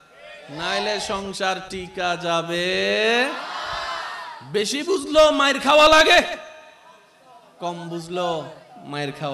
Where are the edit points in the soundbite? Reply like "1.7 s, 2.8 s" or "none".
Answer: none